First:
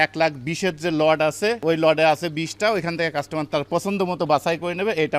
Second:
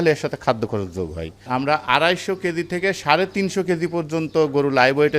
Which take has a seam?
second; 1 cut; at 1.4 s

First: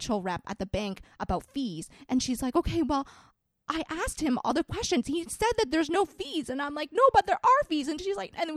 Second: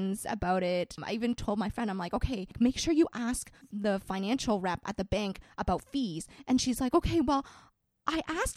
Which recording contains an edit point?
second; 2 cuts; at 1.0 s, 2.5 s

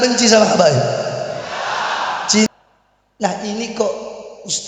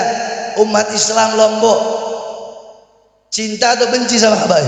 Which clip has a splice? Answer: first; 1 cut; at 2.5 s

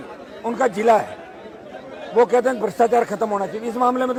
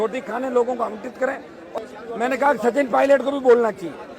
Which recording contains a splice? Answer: second; 1 cut; at 1.6 s

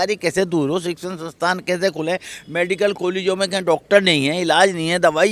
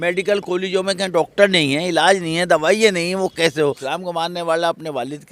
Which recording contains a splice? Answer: second; 1 cut; at 3.8 s

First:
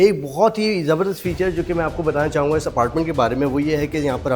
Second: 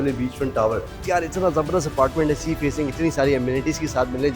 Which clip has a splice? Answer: second; 1 cut; at 0.9 s

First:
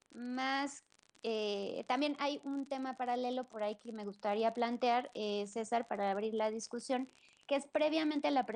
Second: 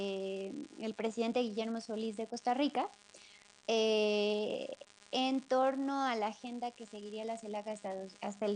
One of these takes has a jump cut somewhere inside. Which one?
first; 1 cut; at 3.8 s

